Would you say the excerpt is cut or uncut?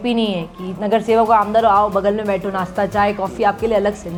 uncut